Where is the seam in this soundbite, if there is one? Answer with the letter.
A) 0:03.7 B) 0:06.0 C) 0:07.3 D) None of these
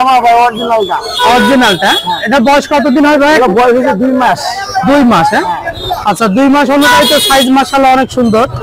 D